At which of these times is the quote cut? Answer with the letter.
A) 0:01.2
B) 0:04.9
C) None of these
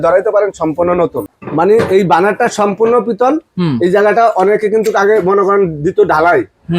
A